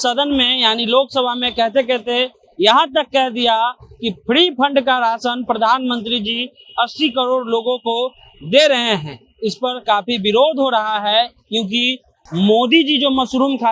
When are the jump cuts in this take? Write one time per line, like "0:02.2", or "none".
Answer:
0:12.2